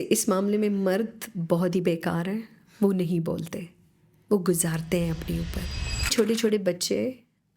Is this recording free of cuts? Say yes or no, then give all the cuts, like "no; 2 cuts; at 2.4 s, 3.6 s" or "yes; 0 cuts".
no; 1 cut; at 6.1 s